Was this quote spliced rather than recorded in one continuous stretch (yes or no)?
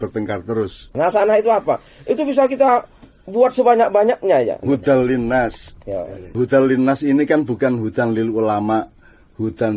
yes